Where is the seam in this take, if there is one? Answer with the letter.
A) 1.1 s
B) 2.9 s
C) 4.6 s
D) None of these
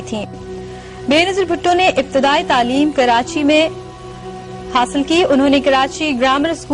B